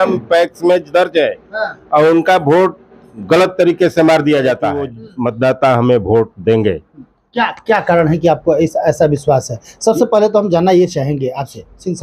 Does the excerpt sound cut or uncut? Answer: cut